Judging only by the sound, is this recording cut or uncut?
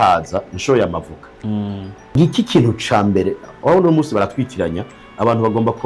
cut